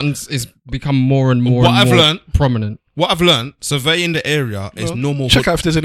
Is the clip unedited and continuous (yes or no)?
yes